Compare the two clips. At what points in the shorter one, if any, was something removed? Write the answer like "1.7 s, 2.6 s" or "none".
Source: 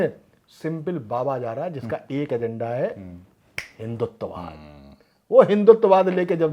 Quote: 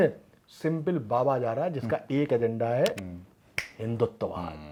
none